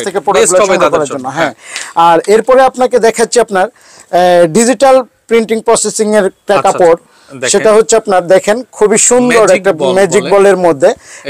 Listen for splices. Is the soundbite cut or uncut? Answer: uncut